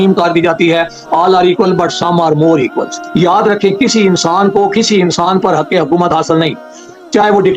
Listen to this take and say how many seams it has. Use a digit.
1